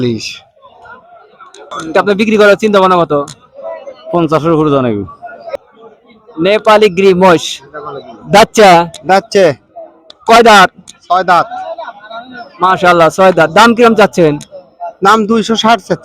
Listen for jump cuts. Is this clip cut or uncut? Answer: cut